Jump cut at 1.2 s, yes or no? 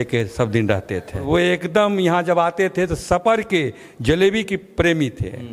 yes